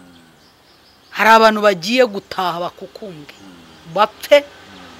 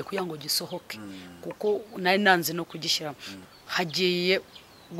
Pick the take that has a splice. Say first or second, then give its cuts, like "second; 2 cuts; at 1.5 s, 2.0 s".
second; 1 cut; at 3.4 s